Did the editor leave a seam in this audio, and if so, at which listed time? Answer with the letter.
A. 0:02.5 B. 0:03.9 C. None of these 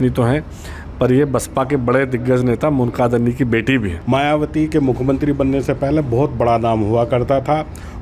B